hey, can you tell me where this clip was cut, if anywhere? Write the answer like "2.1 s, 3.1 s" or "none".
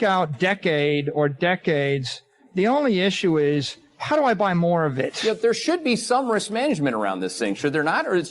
5.1 s